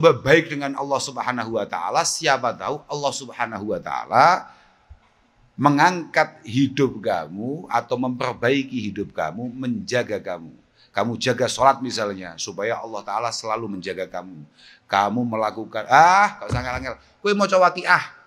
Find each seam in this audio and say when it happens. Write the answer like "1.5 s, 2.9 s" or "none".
none